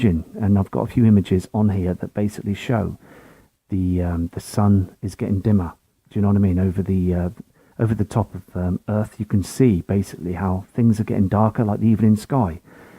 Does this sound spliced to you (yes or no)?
yes